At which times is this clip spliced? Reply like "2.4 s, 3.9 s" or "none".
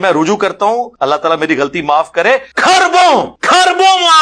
0.9 s, 2.5 s, 3.4 s